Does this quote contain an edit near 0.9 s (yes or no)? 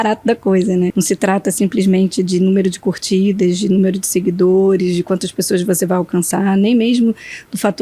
yes